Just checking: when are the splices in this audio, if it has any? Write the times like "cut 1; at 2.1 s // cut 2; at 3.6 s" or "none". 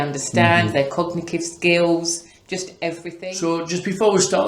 cut 1; at 3.1 s